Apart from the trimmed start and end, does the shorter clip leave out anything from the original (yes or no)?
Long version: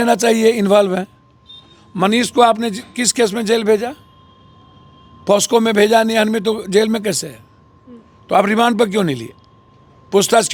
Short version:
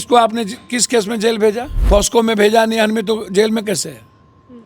yes